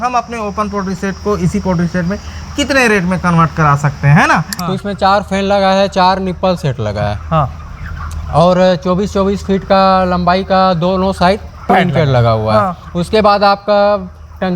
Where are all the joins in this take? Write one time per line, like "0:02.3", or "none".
0:04.6